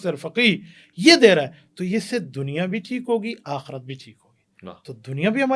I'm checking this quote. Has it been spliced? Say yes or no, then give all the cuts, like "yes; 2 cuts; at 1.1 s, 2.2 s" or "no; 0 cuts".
no; 0 cuts